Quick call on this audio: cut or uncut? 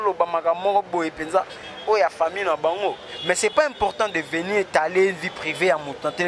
cut